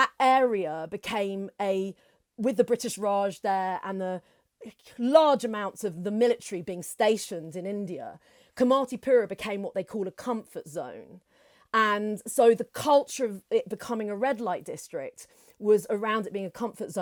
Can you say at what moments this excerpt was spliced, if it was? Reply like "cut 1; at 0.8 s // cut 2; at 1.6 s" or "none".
none